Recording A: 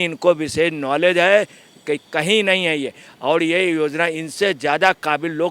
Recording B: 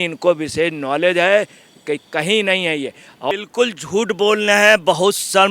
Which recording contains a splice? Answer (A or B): B